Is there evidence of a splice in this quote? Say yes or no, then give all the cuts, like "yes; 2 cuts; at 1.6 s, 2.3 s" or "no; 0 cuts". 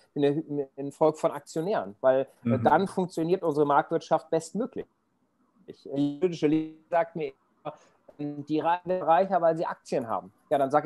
no; 0 cuts